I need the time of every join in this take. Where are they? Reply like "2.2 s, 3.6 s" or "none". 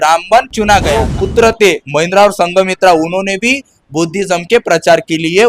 1.1 s